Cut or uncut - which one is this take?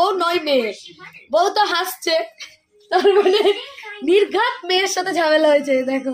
uncut